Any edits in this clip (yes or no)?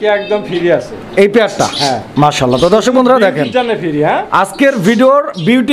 no